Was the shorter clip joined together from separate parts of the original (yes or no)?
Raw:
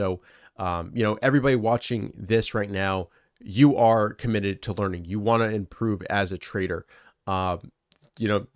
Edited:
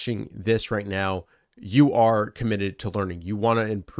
no